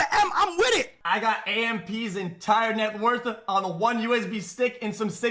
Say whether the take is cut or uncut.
cut